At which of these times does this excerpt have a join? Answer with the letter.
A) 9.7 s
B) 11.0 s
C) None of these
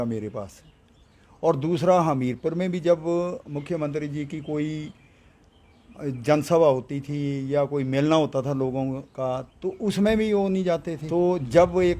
B